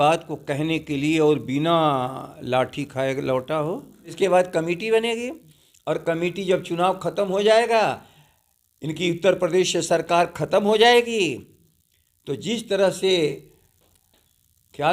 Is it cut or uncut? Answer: cut